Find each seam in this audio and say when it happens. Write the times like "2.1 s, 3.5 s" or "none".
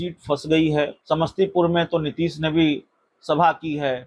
1.0 s